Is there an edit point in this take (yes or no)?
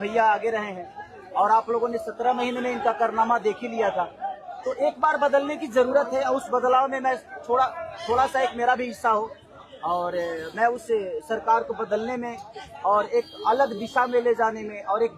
no